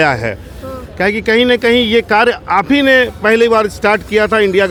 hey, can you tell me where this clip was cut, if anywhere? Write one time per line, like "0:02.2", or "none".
none